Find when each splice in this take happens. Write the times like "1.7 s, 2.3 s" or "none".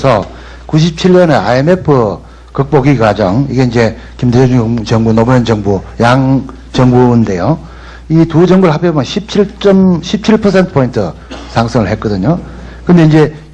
3.7 s